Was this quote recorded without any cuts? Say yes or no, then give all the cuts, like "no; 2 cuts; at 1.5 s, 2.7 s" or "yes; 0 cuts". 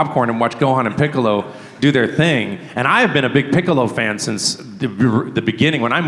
yes; 0 cuts